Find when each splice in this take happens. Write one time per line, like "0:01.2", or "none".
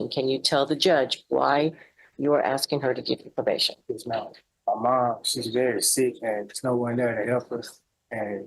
0:04.4